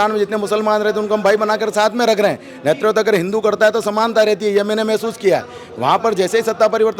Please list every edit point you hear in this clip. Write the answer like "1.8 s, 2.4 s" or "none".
none